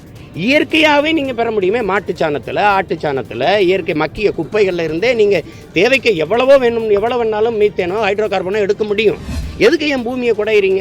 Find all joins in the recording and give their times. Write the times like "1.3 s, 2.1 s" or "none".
9.4 s